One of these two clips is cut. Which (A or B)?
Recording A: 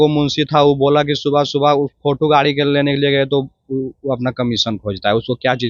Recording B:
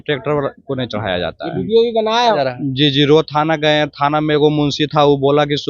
B